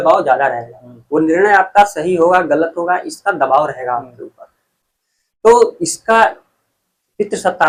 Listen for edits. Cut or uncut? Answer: uncut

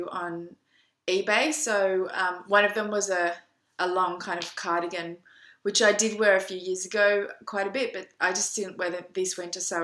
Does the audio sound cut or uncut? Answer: uncut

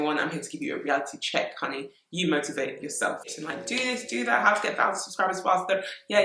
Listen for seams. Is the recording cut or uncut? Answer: cut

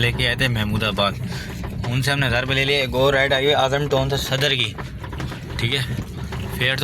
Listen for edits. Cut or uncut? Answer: uncut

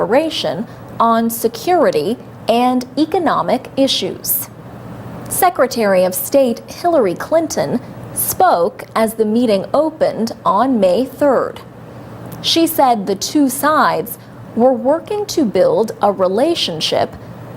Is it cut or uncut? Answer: cut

